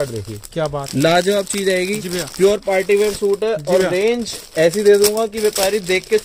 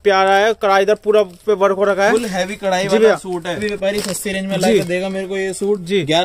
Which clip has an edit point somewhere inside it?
second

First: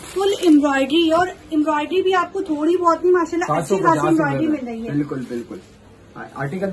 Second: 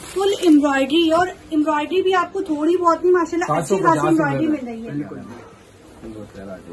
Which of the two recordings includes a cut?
second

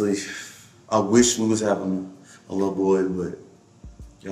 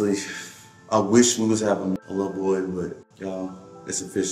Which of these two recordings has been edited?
second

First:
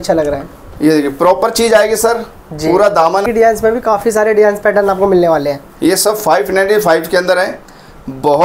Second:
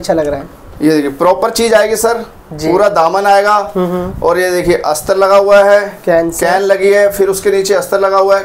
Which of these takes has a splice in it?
first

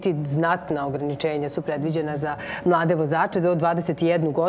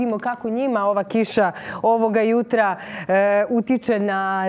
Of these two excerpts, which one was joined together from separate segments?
second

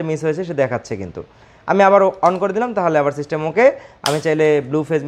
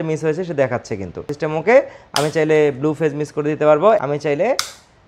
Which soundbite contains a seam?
second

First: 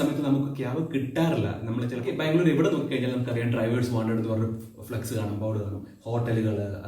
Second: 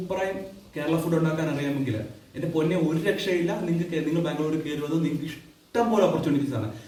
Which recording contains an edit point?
first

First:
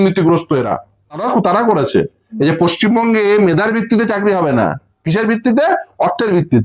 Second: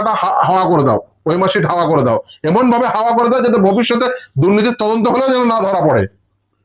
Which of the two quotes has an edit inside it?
first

